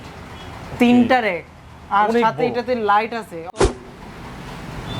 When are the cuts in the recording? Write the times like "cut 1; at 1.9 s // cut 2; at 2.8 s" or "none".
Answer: cut 1; at 3.7 s